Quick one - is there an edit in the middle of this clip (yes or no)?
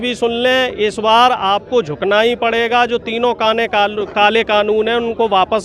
no